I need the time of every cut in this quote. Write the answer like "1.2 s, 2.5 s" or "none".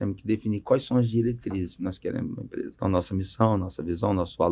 2.7 s

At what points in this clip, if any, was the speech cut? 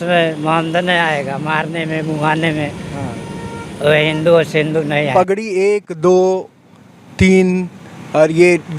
5.1 s

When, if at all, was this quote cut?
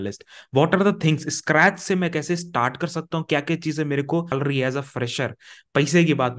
4.3 s

